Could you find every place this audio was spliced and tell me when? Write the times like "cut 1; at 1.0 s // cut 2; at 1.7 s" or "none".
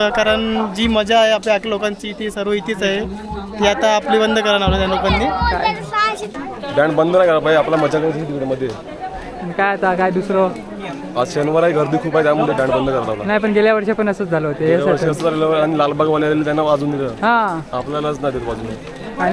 none

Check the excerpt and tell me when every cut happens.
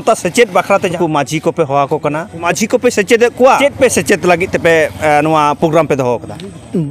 cut 1; at 0.9 s // cut 2; at 2.5 s // cut 3; at 3.6 s

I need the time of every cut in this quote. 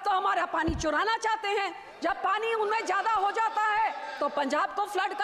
none

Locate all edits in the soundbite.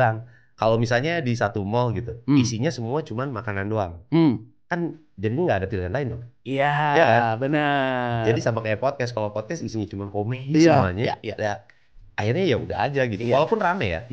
none

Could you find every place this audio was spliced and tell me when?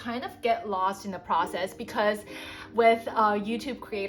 none

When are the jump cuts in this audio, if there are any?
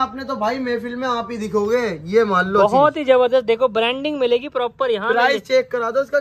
none

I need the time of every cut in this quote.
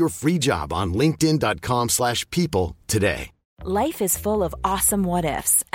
none

